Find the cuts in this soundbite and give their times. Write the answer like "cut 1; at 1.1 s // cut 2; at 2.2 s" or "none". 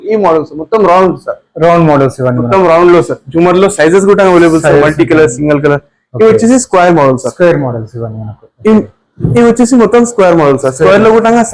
none